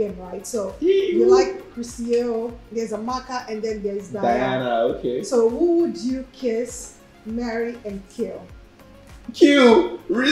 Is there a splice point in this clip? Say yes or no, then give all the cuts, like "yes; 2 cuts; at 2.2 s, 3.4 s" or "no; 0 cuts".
no; 0 cuts